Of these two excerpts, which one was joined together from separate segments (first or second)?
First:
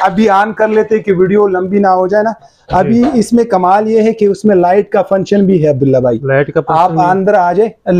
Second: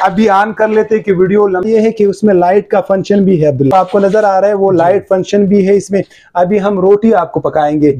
second